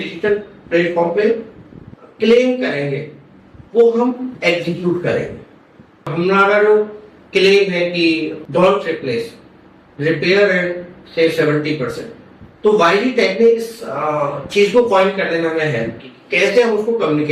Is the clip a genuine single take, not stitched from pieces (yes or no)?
no